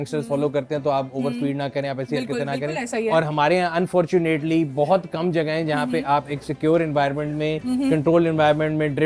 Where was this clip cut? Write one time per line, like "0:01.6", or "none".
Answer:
none